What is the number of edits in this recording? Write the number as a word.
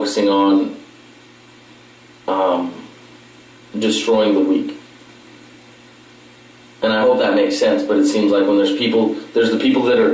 one